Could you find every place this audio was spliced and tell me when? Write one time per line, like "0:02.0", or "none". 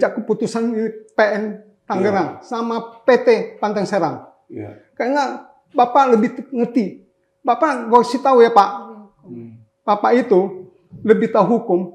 none